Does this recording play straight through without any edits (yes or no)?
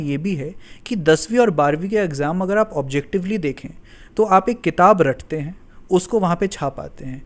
yes